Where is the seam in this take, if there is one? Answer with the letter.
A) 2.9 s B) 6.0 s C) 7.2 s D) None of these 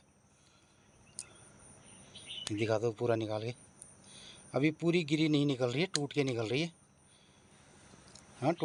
D